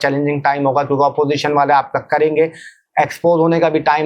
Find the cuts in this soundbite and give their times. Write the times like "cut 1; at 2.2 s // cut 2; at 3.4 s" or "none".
none